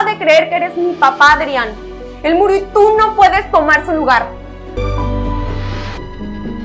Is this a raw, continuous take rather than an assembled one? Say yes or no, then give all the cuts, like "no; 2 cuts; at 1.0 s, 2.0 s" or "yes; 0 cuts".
no; 1 cut; at 4.7 s